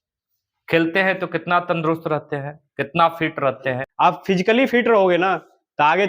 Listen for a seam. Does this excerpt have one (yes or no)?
yes